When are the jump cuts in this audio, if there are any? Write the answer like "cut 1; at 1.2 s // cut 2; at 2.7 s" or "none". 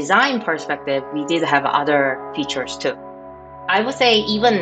cut 1; at 3.5 s

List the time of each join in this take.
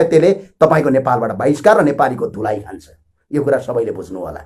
none

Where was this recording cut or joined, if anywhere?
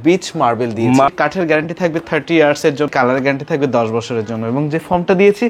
cut 1; at 1.1 s // cut 2; at 2.9 s

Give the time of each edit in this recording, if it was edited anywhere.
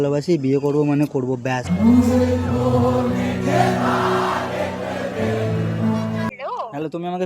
cut 1; at 6.3 s

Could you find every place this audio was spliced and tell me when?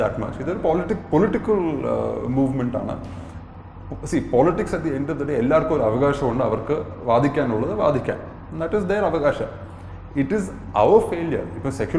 none

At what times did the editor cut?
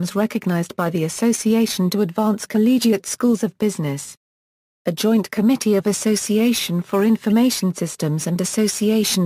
cut 1; at 2.8 s

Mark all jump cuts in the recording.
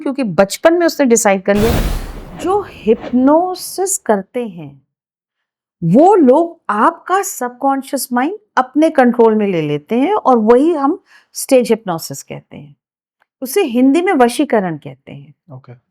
cut 1; at 1.7 s

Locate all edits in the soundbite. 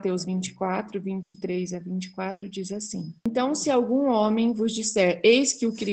cut 1; at 3.3 s

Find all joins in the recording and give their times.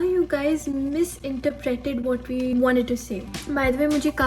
cut 1; at 2.5 s // cut 2; at 3.2 s

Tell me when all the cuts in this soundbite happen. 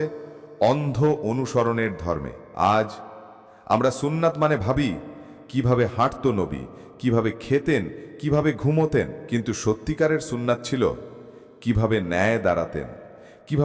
cut 1; at 2.4 s // cut 2; at 9.2 s

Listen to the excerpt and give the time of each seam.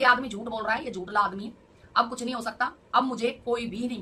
none

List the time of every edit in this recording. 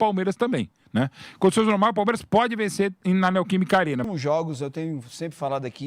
cut 1; at 4.0 s

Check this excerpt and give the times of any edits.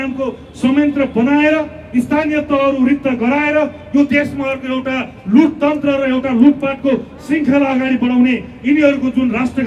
none

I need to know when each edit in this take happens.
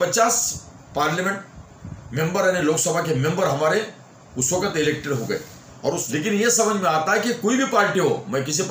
cut 1; at 6.0 s

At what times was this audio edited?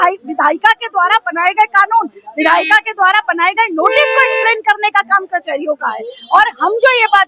none

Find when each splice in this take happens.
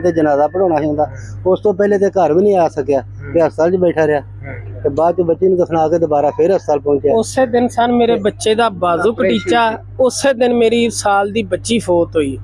none

